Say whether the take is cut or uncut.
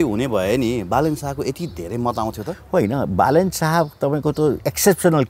uncut